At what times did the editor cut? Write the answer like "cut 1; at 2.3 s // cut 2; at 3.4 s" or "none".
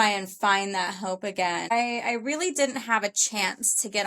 cut 1; at 1.7 s